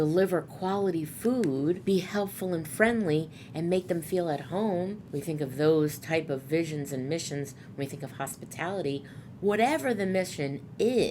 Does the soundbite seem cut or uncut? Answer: cut